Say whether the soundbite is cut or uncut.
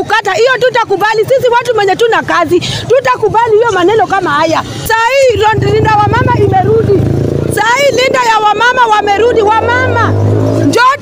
cut